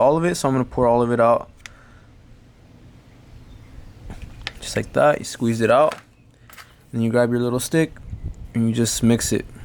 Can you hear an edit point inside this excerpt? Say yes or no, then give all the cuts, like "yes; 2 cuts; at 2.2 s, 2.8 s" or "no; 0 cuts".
no; 0 cuts